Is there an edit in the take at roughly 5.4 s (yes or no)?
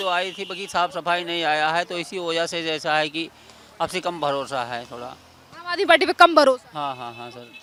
no